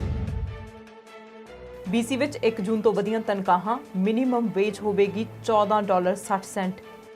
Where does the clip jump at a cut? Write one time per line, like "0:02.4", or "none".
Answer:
0:01.7